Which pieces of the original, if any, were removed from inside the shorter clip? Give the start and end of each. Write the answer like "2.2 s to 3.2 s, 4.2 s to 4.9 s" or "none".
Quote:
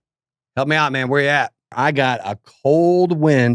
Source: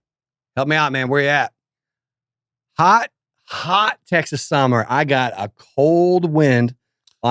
1.7 s to 4.9 s